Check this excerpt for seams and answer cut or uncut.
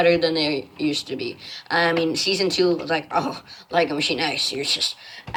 uncut